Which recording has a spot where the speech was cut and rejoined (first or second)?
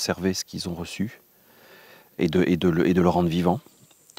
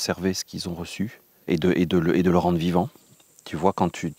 second